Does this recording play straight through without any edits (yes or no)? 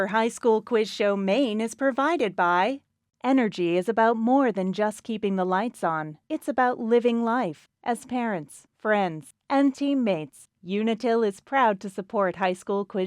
no